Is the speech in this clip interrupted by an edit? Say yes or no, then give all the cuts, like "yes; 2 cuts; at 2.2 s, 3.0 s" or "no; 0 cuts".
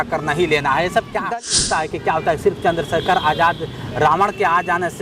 yes; 1 cut; at 1.1 s